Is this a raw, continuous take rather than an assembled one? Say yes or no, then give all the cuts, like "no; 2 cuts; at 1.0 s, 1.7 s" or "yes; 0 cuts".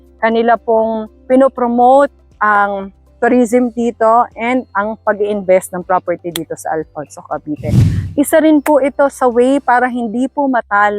no; 1 cut; at 8.0 s